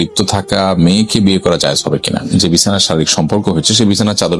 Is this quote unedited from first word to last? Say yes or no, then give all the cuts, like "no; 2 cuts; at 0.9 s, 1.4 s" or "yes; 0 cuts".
no; 1 cut; at 2.3 s